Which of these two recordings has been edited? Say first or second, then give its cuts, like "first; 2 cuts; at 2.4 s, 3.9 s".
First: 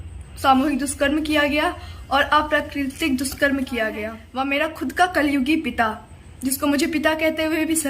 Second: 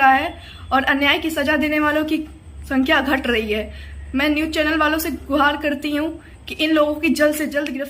first; 1 cut; at 4.2 s